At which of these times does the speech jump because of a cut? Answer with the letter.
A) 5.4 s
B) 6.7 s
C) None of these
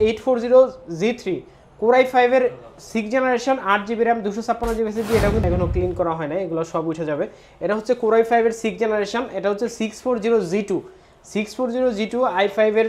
A